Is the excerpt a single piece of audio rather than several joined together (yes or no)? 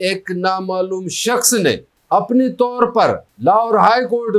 no